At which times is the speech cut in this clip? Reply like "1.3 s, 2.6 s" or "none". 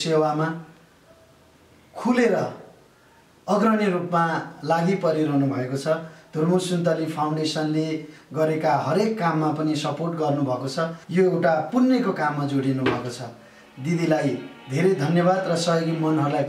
11.0 s